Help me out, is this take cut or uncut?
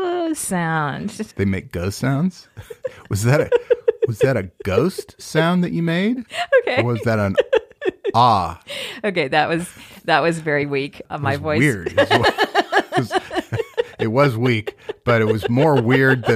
cut